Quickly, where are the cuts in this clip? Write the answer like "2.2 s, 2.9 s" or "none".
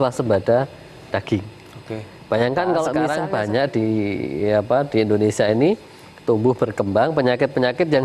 3.1 s